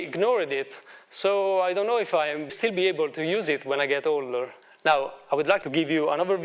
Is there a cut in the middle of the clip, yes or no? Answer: yes